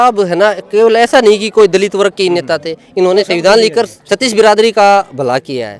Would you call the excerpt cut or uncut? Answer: uncut